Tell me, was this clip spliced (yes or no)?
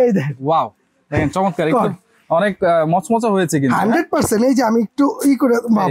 no